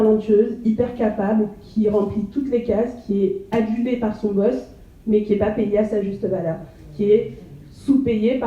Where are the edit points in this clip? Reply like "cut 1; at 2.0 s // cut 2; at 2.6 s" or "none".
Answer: none